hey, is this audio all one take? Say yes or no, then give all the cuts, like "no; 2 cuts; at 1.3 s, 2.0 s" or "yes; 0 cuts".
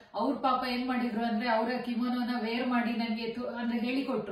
yes; 0 cuts